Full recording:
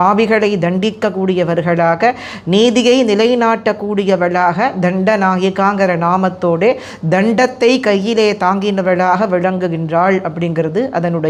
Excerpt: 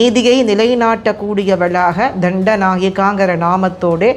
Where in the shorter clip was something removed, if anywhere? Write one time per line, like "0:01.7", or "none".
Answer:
none